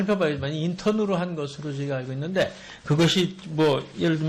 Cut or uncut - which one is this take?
cut